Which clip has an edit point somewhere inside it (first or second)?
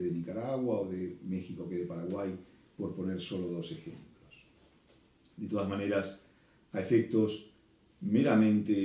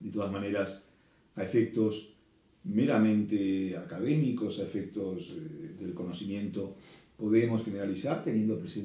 first